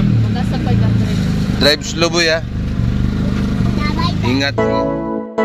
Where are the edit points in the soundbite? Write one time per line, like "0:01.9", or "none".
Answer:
0:04.5

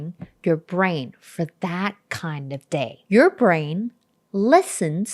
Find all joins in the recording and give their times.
0:03.0

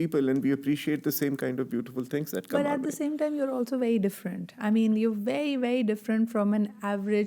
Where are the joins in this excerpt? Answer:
none

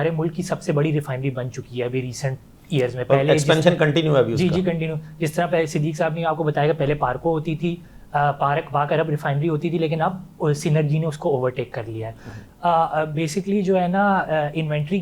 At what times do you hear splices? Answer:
0:12.4

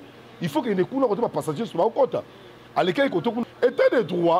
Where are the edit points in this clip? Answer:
0:03.4

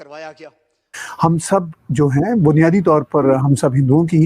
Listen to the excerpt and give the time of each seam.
0:01.0

